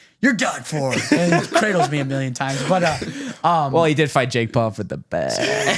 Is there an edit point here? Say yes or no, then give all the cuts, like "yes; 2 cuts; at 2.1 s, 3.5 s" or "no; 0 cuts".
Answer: no; 0 cuts